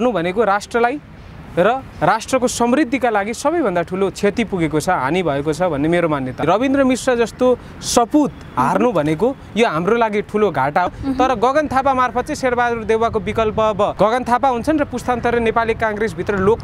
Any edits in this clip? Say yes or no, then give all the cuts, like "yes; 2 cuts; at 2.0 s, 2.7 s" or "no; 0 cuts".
yes; 3 cuts; at 6.4 s, 10.9 s, 13.9 s